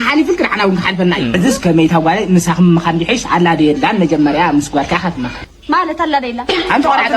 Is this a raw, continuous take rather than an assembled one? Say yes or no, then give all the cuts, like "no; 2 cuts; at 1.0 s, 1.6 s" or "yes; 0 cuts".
yes; 0 cuts